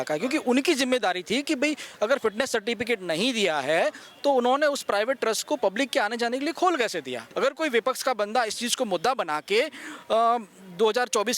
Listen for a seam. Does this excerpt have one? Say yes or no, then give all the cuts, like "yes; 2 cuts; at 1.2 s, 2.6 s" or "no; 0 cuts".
yes; 1 cut; at 7.2 s